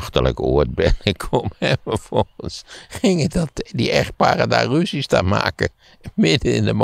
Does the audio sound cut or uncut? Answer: uncut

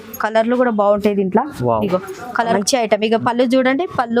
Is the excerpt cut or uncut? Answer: cut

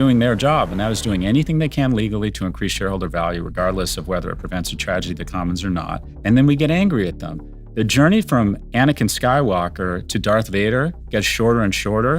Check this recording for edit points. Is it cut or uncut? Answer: cut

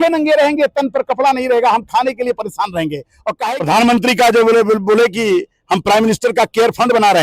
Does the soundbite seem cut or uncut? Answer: cut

